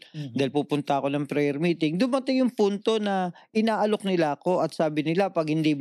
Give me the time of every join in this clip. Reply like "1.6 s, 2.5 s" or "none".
none